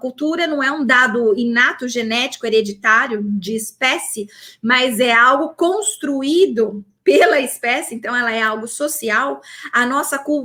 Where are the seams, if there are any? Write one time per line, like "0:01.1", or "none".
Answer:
none